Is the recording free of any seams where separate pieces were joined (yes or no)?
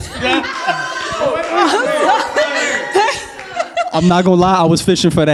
yes